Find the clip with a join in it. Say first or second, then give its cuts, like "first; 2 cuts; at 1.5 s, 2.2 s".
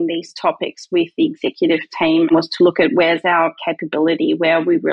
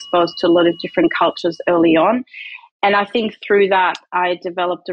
first; 1 cut; at 2.3 s